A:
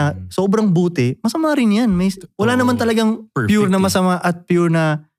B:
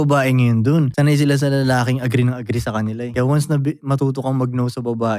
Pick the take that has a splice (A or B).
B